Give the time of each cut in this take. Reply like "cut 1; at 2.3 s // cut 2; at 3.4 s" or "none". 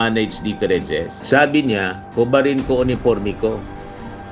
cut 1; at 1.1 s